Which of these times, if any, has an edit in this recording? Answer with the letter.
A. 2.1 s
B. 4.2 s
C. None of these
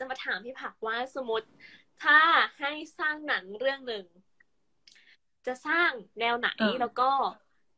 C